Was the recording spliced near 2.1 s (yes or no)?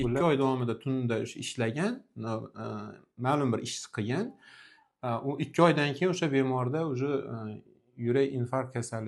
no